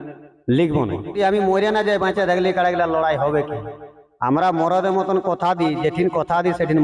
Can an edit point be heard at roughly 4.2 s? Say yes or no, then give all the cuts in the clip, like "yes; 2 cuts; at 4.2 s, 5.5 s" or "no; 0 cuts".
no; 1 cut; at 1.1 s